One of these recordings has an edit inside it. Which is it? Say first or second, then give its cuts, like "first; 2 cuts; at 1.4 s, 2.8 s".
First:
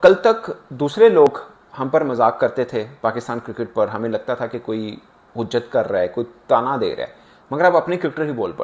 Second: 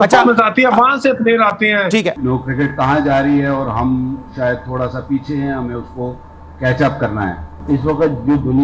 second; 2 cuts; at 2.2 s, 7.5 s